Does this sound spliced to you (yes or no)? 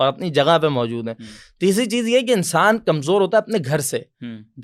no